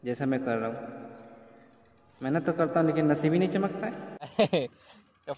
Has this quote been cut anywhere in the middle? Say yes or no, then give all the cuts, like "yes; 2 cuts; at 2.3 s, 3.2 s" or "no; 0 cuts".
yes; 1 cut; at 4.3 s